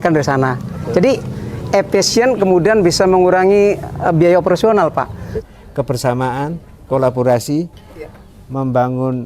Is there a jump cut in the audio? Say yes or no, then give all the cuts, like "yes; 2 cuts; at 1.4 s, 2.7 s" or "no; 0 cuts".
yes; 1 cut; at 5.4 s